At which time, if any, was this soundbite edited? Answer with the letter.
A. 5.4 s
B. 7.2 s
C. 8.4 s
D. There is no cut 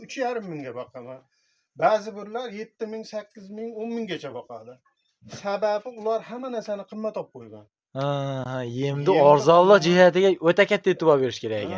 D